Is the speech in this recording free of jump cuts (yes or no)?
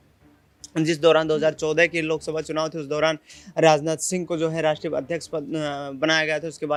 yes